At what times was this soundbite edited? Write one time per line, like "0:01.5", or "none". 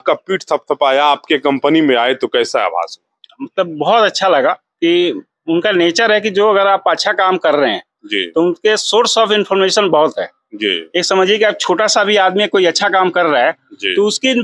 none